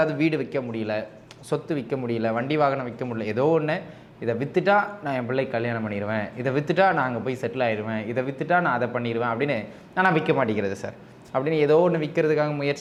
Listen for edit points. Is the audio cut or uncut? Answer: uncut